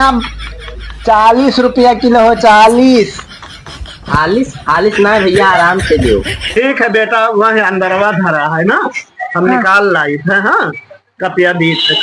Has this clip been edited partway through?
yes; 1 cut; at 6.4 s

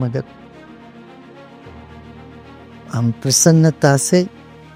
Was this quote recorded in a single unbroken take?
yes; 0 cuts

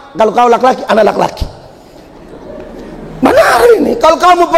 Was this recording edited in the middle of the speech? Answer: no; 0 cuts

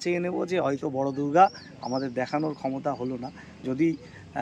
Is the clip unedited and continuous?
yes; 0 cuts

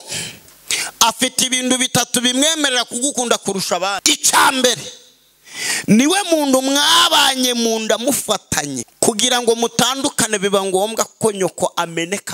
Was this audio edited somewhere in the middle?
yes; 2 cuts; at 4.0 s, 8.8 s

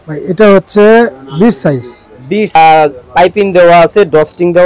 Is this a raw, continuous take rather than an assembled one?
no; 1 cut; at 2.6 s

